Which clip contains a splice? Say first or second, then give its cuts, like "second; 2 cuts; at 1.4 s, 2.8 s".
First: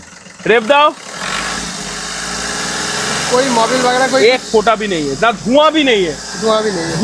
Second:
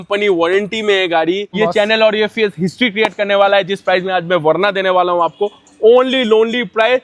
second; 1 cut; at 1.5 s